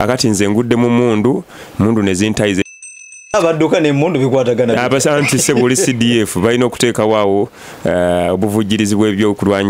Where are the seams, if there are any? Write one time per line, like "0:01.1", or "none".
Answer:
0:02.7